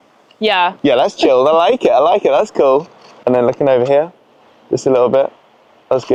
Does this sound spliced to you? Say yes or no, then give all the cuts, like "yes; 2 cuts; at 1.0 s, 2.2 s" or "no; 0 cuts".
no; 0 cuts